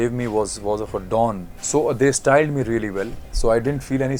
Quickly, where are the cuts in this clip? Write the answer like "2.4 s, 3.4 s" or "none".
1.5 s

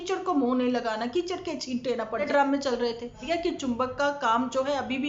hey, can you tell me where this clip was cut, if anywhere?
2.3 s, 3.2 s

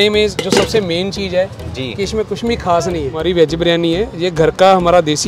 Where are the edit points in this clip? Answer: 3.1 s

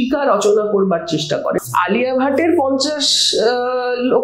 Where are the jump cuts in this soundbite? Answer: 1.6 s

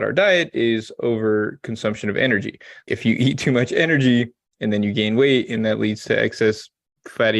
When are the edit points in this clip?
2.8 s

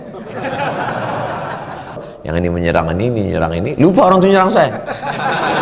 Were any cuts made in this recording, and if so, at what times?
2.1 s

